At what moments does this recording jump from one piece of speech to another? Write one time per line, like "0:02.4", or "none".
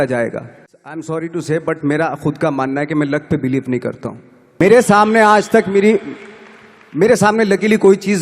0:00.9
0:04.6